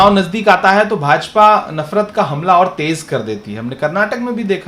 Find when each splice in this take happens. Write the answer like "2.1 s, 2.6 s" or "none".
none